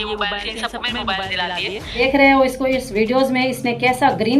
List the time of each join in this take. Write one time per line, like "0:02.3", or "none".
0:02.0